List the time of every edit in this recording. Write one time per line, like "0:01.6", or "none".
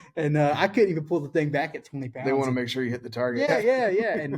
0:03.5